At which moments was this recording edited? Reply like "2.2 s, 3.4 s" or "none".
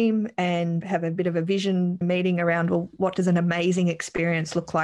0.8 s, 2.0 s, 2.9 s